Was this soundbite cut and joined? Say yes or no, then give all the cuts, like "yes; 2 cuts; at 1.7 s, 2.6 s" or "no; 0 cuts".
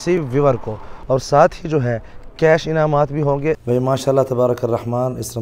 yes; 2 cuts; at 0.9 s, 3.6 s